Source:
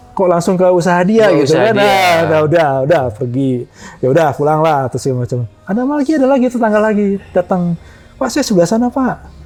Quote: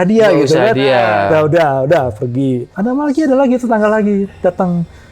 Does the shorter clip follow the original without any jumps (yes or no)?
no